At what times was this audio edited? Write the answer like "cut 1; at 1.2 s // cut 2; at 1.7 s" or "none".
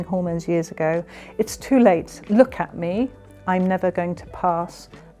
none